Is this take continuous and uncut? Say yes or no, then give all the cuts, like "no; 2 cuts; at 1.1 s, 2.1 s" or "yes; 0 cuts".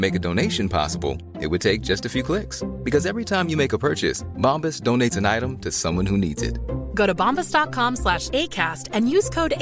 yes; 0 cuts